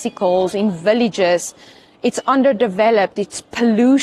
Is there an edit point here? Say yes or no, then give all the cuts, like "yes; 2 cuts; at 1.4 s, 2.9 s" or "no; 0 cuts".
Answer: no; 0 cuts